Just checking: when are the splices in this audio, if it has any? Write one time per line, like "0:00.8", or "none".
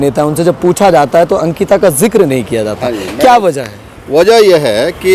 none